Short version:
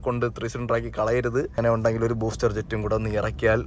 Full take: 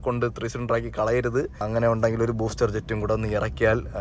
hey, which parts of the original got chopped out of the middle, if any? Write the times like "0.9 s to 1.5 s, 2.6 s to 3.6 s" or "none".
1.5 s to 1.7 s